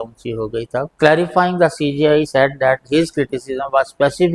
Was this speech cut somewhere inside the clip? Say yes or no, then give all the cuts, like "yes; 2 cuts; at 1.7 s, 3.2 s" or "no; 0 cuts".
yes; 1 cut; at 0.9 s